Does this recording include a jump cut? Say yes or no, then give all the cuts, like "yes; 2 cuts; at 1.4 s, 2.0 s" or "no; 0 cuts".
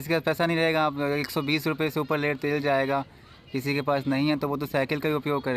no; 0 cuts